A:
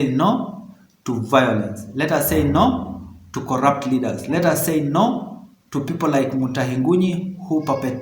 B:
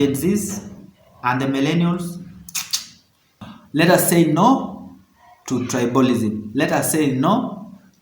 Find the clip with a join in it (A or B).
B